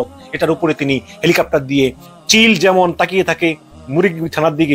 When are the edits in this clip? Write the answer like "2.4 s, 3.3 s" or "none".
2.1 s